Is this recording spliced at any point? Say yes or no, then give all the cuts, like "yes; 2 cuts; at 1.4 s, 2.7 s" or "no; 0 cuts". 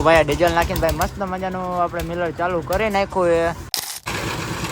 yes; 1 cut; at 3.7 s